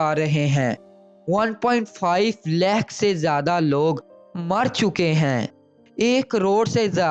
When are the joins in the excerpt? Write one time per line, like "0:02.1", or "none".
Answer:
none